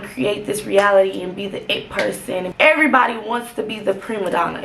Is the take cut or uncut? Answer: cut